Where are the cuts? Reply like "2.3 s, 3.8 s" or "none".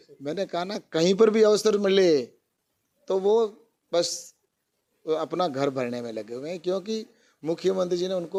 none